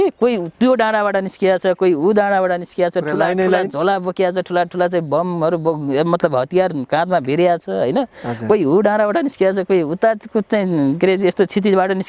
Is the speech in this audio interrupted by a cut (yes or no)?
no